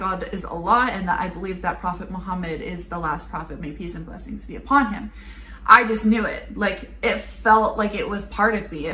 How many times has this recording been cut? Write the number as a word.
zero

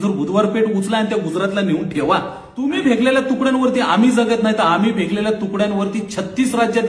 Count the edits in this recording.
one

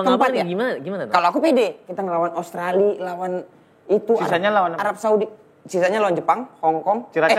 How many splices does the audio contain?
one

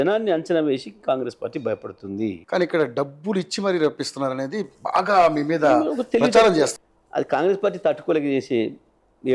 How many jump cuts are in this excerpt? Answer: two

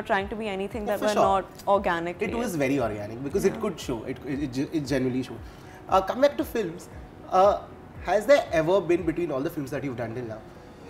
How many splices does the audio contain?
zero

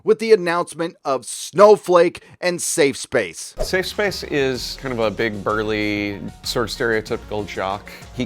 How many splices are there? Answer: one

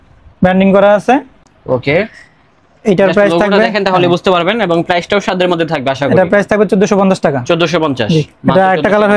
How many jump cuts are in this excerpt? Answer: zero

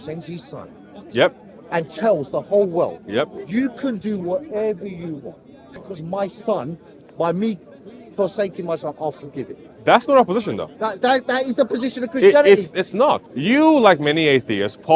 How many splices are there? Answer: two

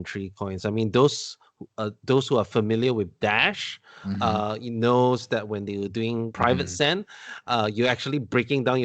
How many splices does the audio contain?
one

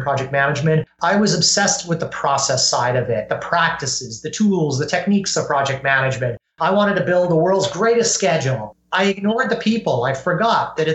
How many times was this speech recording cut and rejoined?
one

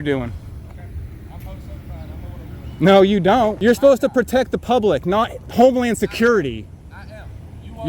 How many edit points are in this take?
one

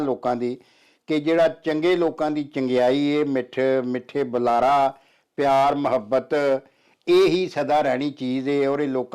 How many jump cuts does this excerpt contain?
zero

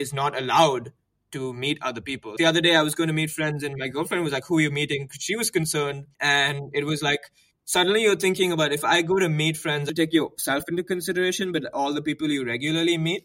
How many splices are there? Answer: three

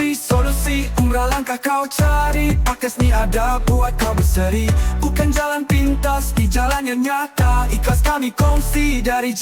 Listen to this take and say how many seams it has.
zero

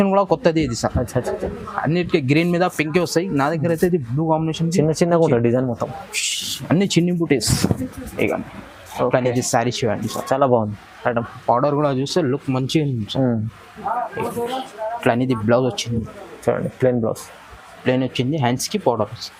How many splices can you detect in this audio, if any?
zero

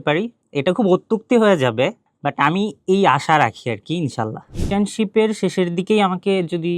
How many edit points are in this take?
one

